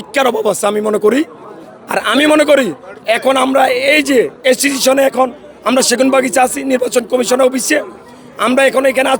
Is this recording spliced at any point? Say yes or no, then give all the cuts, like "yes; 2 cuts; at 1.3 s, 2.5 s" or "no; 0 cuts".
no; 0 cuts